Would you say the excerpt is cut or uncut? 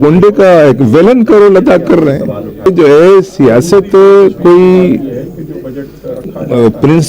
cut